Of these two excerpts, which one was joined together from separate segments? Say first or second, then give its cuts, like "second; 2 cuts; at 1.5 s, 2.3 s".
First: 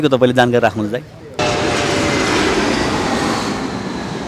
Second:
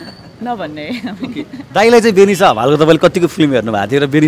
first; 1 cut; at 1.4 s